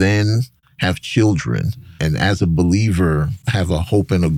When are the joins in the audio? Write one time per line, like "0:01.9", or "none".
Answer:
0:01.9
0:03.4